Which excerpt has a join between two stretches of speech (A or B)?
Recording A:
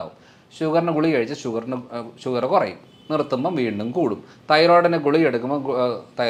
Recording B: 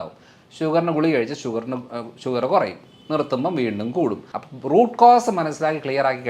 B